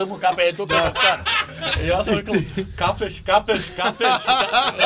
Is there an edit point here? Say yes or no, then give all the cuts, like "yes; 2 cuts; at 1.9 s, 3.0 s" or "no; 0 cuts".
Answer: no; 0 cuts